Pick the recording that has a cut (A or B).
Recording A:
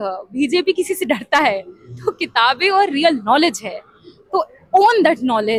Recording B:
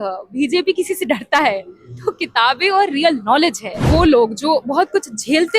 B